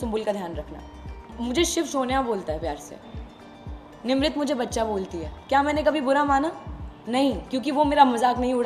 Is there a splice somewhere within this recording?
yes; 1 cut; at 1.2 s

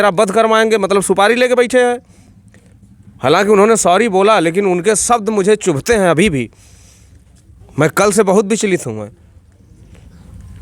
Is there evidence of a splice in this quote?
no; 0 cuts

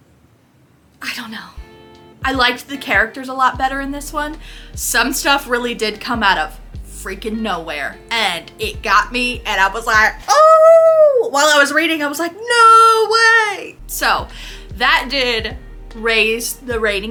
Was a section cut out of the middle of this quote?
no; 0 cuts

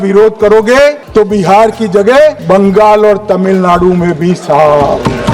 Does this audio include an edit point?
yes; 2 cuts; at 1.0 s, 2.4 s

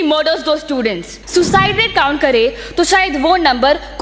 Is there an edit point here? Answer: yes; 1 cut; at 1.1 s

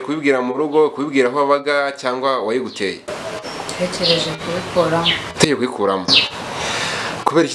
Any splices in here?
no; 0 cuts

